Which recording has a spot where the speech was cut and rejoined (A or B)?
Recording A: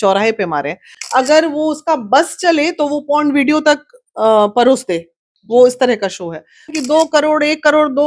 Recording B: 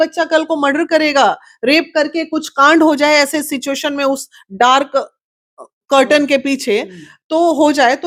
A